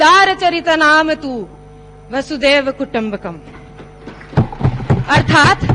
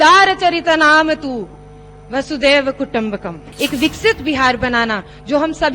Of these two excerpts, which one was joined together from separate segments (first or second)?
second